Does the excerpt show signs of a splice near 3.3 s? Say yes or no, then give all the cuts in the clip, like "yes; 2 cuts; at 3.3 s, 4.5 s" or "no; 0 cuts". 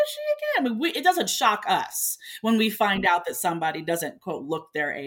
no; 0 cuts